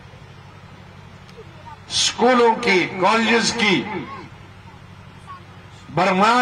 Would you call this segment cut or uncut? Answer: uncut